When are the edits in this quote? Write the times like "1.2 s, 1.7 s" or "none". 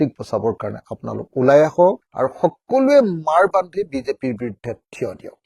none